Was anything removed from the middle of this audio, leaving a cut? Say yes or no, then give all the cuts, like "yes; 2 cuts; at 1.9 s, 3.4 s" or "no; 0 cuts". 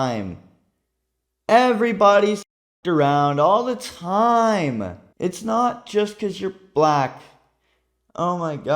yes; 1 cut; at 5.0 s